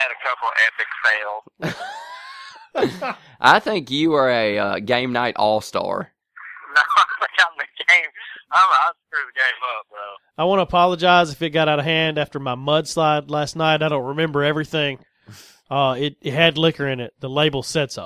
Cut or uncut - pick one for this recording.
uncut